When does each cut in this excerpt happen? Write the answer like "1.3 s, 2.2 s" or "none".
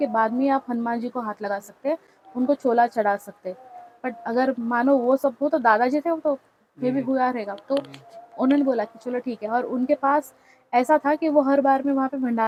none